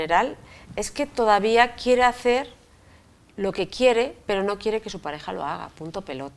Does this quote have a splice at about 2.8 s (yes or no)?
no